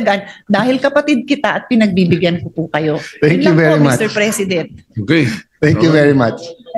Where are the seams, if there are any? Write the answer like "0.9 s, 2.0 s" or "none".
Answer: none